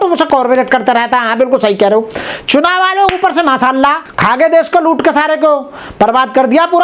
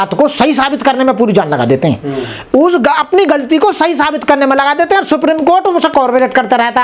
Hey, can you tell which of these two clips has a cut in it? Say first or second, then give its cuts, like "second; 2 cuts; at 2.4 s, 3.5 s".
first; 1 cut; at 4.1 s